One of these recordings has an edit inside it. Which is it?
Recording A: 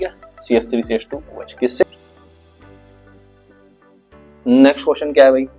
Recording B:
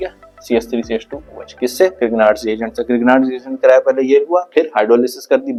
A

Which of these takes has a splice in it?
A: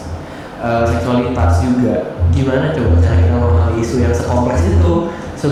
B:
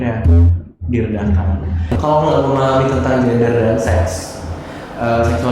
B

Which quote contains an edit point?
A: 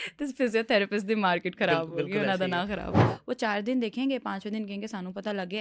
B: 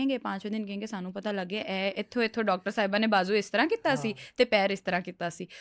A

